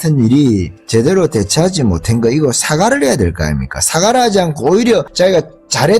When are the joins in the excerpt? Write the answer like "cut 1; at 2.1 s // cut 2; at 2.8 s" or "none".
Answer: cut 1; at 5.1 s